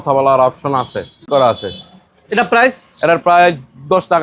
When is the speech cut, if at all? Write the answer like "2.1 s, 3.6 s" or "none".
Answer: 1.2 s